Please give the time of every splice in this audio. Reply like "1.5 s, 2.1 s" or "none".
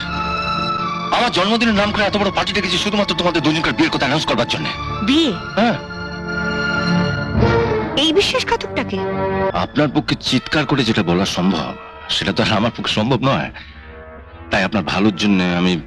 9.5 s